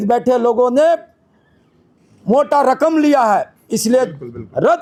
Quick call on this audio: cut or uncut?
uncut